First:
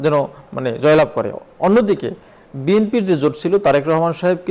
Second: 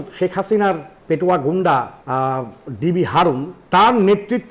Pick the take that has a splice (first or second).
second